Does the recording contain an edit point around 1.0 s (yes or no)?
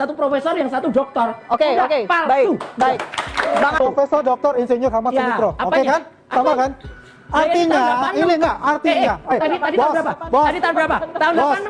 no